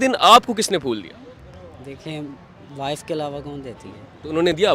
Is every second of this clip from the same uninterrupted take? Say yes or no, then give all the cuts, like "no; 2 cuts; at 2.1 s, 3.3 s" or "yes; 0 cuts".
yes; 0 cuts